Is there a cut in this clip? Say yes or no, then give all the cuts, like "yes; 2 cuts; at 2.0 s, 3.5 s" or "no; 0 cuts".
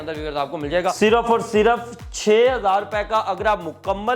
yes; 1 cut; at 1.0 s